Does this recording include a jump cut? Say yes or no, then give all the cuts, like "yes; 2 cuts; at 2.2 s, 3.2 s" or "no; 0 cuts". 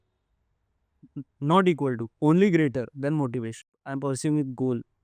yes; 1 cut; at 3.9 s